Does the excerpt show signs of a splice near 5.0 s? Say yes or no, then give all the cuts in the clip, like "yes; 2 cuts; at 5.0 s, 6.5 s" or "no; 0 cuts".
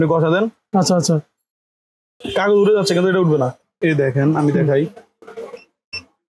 no; 1 cut; at 3.6 s